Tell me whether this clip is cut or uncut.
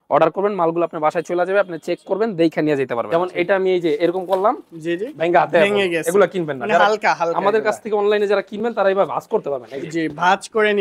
cut